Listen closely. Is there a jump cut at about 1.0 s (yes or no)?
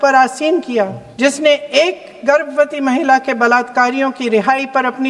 yes